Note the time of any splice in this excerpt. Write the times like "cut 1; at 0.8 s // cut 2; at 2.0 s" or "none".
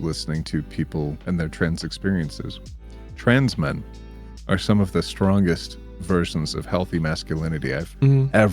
cut 1; at 1.2 s